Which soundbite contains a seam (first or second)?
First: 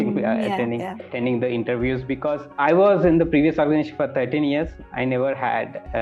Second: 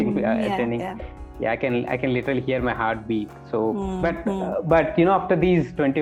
first